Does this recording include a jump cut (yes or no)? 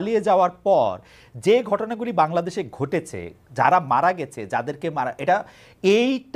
no